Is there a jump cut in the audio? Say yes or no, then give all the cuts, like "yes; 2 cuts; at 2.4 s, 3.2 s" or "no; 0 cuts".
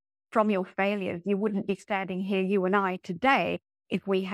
no; 0 cuts